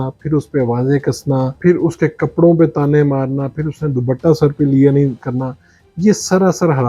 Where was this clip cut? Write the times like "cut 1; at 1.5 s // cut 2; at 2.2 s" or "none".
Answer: cut 1; at 1.5 s